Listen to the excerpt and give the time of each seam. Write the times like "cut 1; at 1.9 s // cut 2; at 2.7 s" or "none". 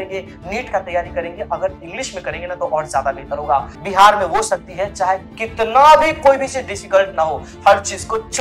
cut 1; at 3.8 s